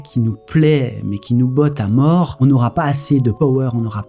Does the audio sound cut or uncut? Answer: cut